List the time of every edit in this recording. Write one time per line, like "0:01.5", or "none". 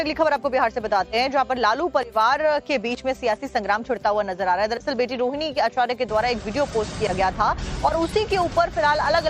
0:03.4